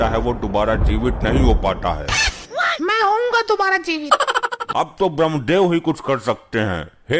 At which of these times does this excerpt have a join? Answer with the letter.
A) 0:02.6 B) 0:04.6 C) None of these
B